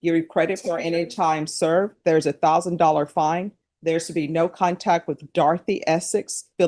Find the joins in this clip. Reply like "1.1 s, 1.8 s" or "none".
none